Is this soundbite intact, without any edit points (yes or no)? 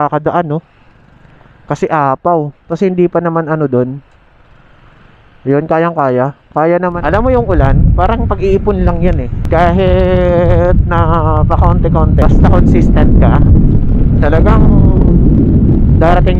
no